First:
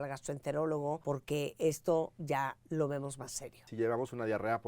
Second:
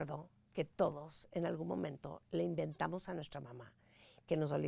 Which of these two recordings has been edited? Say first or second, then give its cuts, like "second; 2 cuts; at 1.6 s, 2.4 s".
first; 3 cuts; at 1.0 s, 2.2 s, 3.6 s